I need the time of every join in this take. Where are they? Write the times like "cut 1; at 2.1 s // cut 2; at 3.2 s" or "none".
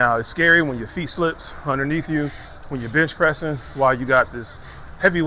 none